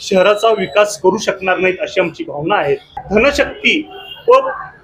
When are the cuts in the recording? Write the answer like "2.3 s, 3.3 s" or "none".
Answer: 3.0 s

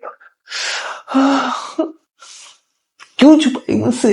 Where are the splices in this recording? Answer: 2.6 s

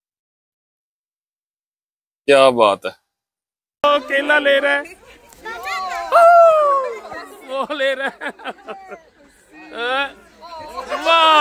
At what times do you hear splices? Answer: 3.8 s

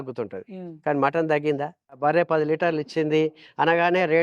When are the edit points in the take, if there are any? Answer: 2.0 s

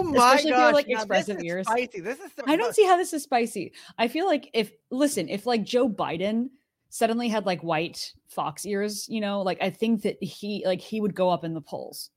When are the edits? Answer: none

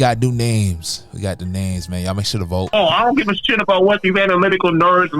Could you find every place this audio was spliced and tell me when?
2.7 s

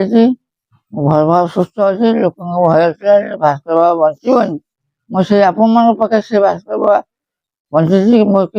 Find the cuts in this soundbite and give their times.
none

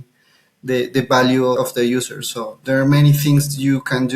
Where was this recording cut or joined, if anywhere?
1.6 s

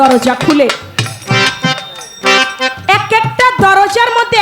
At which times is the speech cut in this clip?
none

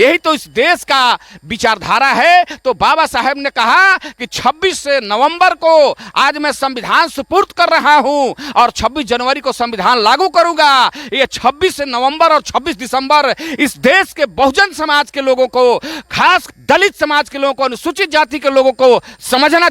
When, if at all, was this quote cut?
16.5 s

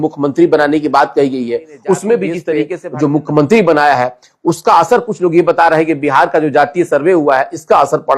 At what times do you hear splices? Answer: 2.7 s

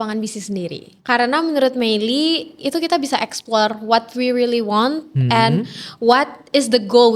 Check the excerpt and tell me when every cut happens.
none

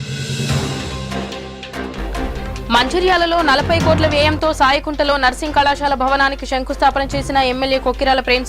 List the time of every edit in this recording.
1.1 s, 2.6 s

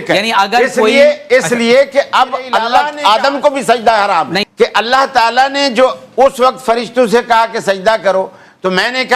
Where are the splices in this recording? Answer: 2.7 s, 4.4 s

